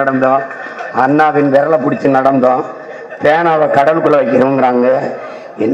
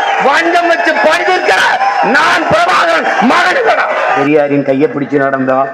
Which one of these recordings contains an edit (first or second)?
second